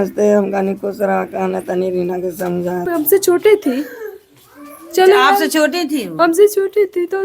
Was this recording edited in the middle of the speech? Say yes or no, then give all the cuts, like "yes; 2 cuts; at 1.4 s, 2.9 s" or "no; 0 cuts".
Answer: yes; 1 cut; at 2.9 s